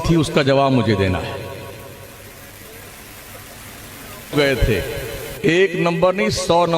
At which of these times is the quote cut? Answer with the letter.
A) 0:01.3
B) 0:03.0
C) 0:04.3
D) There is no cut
C